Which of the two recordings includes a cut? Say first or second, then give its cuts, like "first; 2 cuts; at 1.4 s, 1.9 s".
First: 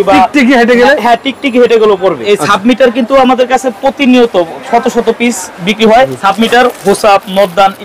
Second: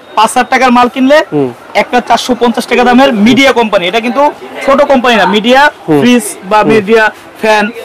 first; 2 cuts; at 2.2 s, 6.1 s